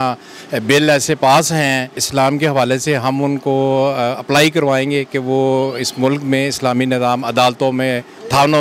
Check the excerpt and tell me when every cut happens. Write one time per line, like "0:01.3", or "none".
0:02.0